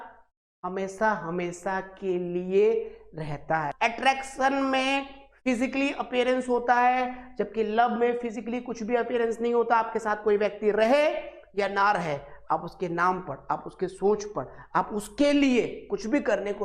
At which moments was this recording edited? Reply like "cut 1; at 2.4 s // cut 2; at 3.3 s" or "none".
cut 1; at 3.7 s